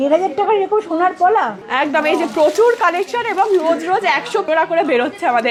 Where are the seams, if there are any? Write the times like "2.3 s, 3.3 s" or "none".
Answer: none

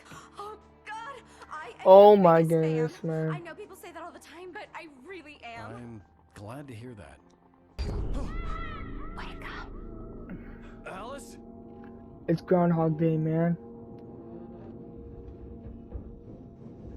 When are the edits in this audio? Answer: 7.8 s

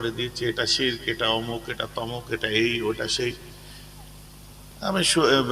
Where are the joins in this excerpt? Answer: none

